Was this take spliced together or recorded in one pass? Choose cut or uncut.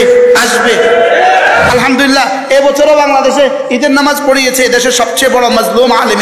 cut